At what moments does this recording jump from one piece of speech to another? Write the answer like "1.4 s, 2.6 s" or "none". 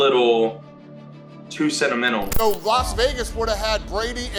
2.3 s